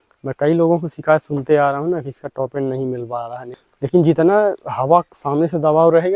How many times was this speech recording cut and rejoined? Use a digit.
1